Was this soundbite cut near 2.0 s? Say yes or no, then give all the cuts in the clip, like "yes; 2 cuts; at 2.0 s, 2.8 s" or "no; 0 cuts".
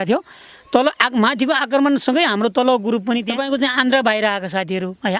no; 1 cut; at 3.4 s